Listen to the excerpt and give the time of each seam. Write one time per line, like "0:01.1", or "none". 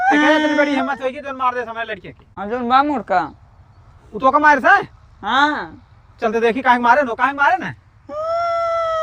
0:02.4